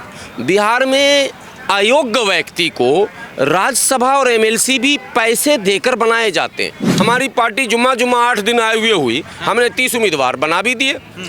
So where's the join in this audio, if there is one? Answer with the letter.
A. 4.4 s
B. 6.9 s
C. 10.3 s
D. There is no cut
B